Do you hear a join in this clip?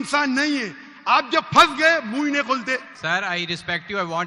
yes; 1 cut; at 2.9 s

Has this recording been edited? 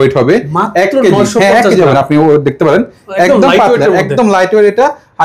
no; 0 cuts

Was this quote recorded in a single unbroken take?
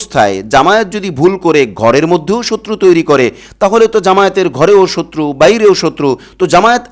yes; 0 cuts

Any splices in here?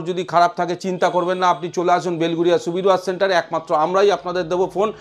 no; 0 cuts

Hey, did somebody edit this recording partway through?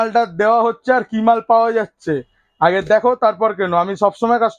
no; 0 cuts

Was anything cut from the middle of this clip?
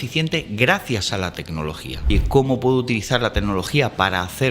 yes; 1 cut; at 2.1 s

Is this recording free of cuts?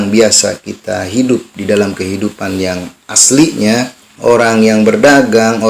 no; 1 cut; at 4.0 s

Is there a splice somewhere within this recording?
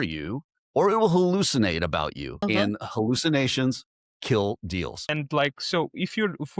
yes; 2 cuts; at 2.3 s, 5.1 s

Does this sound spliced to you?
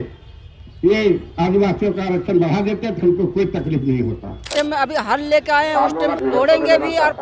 yes; 2 cuts; at 4.5 s, 6.2 s

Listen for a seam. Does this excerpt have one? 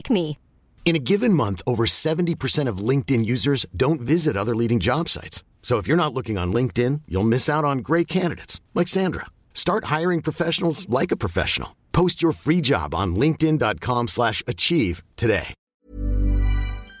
yes; 1 cut; at 15.6 s

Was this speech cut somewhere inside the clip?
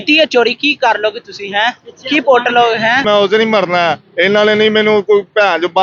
yes; 1 cut; at 3.0 s

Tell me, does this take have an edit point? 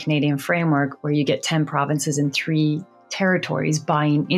no; 0 cuts

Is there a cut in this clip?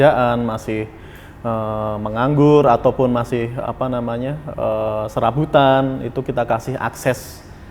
no; 0 cuts

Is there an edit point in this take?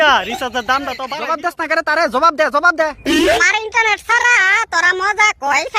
yes; 2 cuts; at 1.1 s, 3.4 s

